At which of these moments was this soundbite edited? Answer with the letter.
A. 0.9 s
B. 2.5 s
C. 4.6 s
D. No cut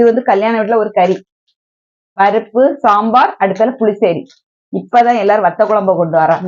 D